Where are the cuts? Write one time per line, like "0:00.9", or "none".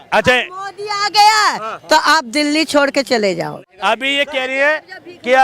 0:03.6